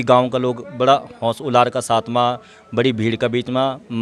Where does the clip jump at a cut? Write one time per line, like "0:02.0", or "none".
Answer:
none